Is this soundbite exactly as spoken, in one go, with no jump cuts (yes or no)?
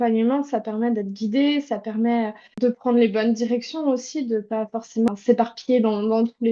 no